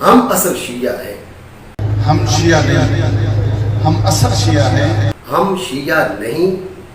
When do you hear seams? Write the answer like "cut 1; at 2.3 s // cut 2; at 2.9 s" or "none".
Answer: cut 1; at 1.7 s // cut 2; at 5.2 s